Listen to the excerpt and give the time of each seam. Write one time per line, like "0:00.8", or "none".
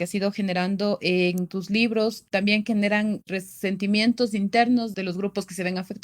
0:04.9